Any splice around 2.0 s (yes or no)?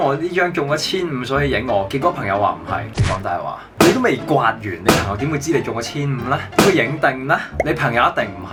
no